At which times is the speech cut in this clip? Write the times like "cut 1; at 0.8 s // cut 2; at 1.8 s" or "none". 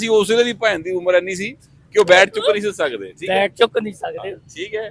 none